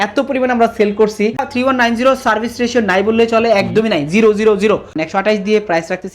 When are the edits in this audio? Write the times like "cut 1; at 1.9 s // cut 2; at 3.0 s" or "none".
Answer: cut 1; at 1.5 s // cut 2; at 5.0 s